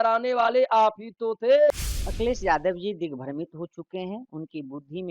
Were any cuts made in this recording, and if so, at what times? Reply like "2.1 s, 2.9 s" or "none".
1.7 s